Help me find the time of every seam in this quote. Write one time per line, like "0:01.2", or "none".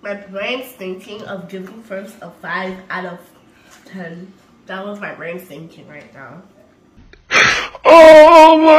0:06.9